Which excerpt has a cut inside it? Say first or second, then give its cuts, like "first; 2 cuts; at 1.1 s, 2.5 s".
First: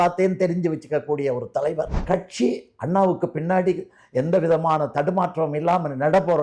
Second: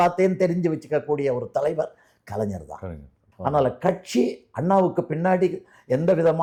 first; 1 cut; at 2.0 s